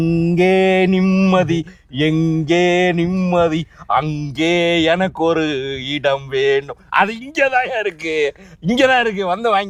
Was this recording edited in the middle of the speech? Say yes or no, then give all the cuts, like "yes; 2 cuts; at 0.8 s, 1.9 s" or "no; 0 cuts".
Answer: no; 0 cuts